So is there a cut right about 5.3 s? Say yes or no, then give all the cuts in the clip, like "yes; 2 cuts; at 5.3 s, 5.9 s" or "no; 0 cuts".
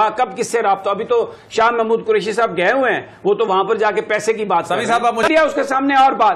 yes; 1 cut; at 5.3 s